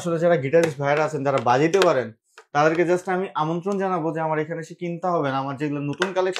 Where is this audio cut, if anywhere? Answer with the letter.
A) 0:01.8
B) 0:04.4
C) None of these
C